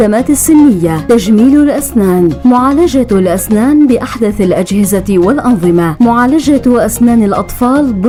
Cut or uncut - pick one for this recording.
uncut